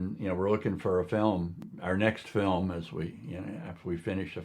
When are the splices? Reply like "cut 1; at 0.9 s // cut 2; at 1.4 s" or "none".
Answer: cut 1; at 1.6 s